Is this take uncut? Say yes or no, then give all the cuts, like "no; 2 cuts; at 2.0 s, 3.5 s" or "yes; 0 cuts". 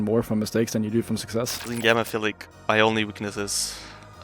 no; 2 cuts; at 1.7 s, 2.5 s